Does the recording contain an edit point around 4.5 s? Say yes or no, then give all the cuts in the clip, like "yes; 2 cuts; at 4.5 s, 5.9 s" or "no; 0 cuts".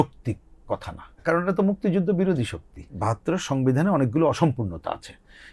no; 2 cuts; at 1.2 s, 3.0 s